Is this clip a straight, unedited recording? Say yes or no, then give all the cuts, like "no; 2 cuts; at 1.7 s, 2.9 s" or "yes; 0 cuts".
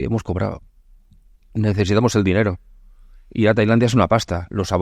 yes; 0 cuts